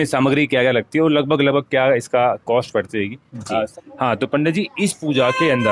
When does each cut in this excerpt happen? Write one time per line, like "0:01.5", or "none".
0:03.8